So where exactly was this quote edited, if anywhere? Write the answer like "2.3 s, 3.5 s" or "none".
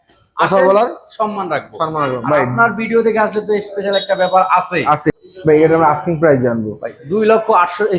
5.1 s